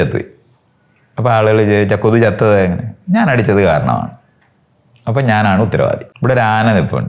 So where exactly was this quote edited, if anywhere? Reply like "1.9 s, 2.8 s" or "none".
6.1 s